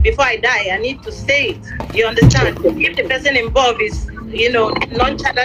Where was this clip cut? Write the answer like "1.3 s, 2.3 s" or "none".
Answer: none